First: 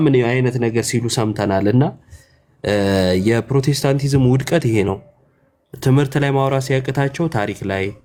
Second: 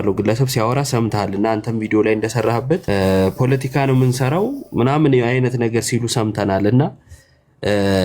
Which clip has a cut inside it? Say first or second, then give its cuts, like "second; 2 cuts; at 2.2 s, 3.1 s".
second; 1 cut; at 2.8 s